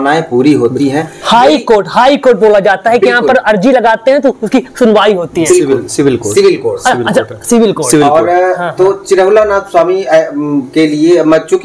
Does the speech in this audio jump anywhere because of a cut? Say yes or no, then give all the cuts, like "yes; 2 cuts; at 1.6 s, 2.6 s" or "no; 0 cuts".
no; 0 cuts